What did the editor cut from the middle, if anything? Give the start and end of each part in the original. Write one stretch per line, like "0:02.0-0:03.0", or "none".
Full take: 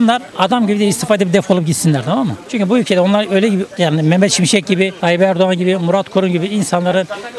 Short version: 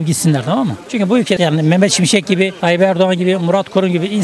0:03.0-0:03.8